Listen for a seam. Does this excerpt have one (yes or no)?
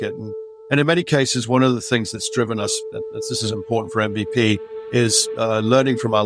no